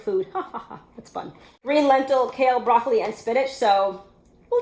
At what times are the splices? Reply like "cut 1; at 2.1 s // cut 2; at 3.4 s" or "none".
cut 1; at 1.6 s